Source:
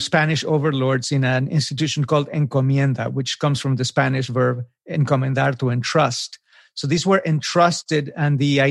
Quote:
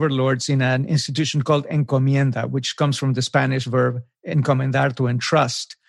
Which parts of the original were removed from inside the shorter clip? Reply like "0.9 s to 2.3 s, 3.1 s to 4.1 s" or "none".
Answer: none

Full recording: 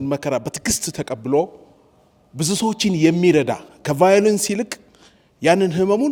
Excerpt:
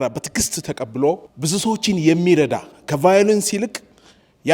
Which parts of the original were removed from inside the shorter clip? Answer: 1.6 s to 2.3 s

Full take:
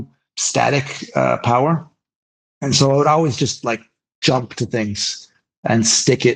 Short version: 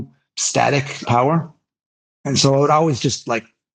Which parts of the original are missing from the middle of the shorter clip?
1.0 s to 1.4 s

